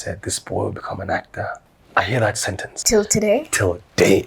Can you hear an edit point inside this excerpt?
yes; 2 cuts; at 1.7 s, 2.7 s

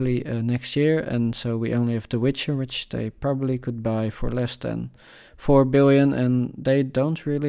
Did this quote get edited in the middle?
no; 0 cuts

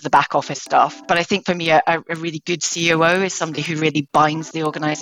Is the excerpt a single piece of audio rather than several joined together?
no; 1 cut; at 1.0 s

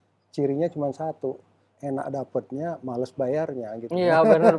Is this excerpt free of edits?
yes; 0 cuts

